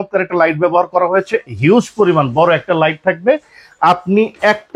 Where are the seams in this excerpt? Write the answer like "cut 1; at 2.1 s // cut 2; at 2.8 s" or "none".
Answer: none